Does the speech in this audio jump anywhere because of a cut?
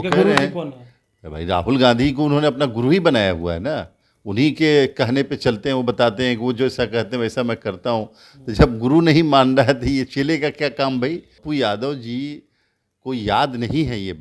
yes; 1 cut; at 11.3 s

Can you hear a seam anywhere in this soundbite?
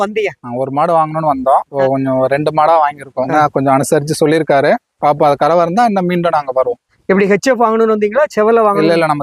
no; 0 cuts

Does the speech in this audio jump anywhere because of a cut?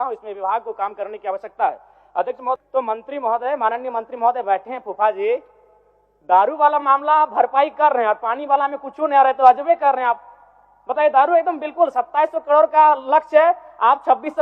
yes; 1 cut; at 2.6 s

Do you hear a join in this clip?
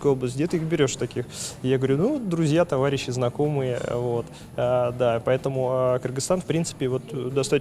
no; 0 cuts

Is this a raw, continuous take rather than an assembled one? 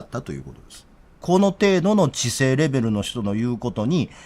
no; 1 cut; at 1.1 s

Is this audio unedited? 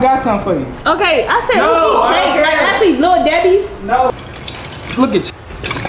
no; 1 cut; at 4.1 s

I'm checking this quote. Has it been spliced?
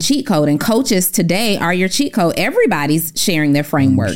no; 0 cuts

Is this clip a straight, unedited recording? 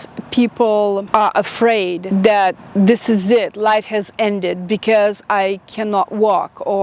no; 2 cuts; at 1.0 s, 2.0 s

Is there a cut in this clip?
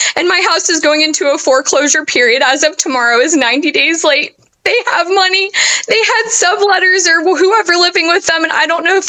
no; 0 cuts

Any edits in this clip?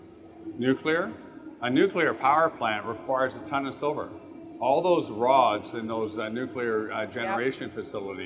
no; 0 cuts

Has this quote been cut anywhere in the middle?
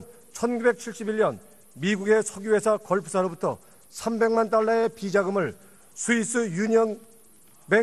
no; 0 cuts

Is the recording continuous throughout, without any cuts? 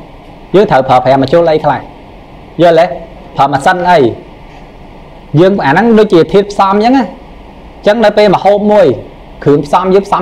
yes; 0 cuts

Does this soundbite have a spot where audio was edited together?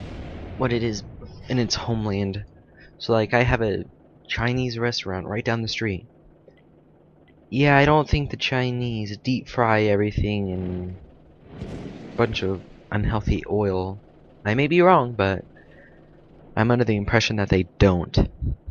no; 0 cuts

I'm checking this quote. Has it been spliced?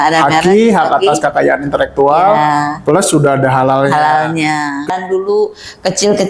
yes; 1 cut; at 4.9 s

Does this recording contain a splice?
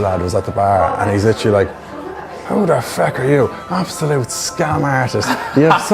no; 0 cuts

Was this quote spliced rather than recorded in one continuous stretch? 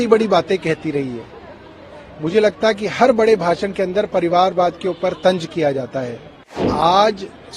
yes; 1 cut; at 6.7 s

